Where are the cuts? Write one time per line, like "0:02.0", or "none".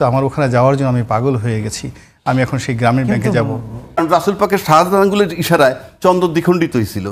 0:04.0